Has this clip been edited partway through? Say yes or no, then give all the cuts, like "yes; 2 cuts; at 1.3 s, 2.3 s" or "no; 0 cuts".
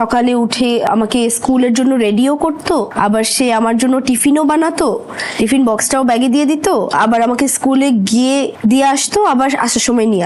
yes; 3 cuts; at 0.8 s, 2.9 s, 8.5 s